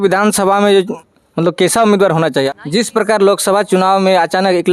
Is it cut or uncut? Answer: cut